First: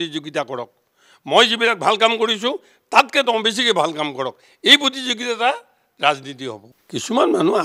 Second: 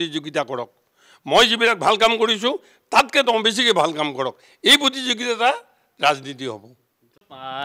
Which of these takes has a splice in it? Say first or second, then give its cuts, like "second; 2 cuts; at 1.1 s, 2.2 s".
first; 1 cut; at 6.7 s